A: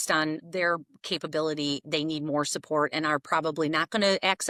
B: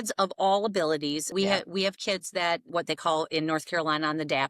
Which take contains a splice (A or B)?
B